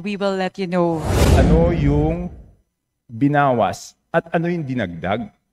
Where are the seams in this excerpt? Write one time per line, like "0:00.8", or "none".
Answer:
0:01.2